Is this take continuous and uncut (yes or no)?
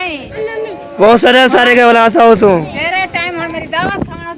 yes